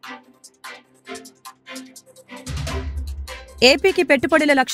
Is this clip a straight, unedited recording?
no; 1 cut; at 3.0 s

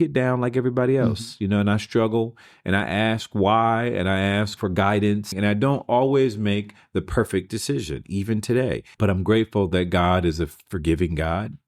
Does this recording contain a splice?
yes; 3 cuts; at 4.5 s, 5.3 s, 8.9 s

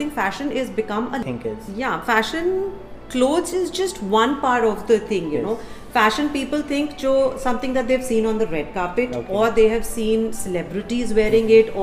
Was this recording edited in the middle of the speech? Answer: yes; 1 cut; at 1.2 s

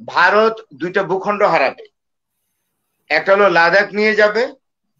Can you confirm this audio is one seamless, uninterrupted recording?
yes; 0 cuts

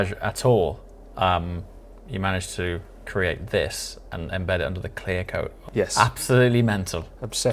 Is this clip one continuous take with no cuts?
no; 1 cut; at 5.6 s

